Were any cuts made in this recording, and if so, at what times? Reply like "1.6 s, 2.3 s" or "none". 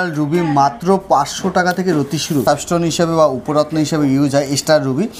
2.4 s